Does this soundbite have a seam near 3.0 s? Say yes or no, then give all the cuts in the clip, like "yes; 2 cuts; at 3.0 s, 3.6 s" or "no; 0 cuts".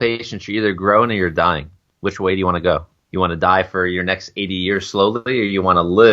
yes; 1 cut; at 3.0 s